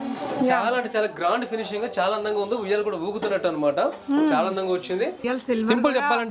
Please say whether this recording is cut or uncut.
cut